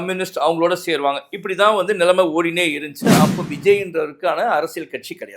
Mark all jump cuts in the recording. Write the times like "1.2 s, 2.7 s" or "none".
3.1 s